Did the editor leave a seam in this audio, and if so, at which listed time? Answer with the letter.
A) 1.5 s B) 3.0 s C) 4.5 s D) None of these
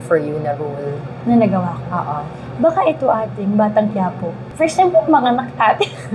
C